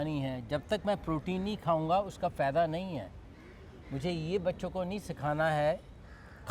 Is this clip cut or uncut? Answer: uncut